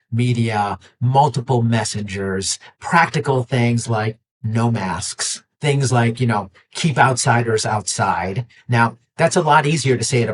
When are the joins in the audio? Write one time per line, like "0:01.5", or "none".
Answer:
0:02.6